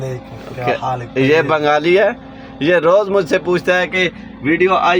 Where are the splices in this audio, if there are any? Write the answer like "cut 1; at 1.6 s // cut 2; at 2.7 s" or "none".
none